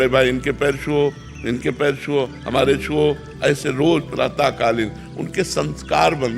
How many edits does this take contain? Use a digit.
0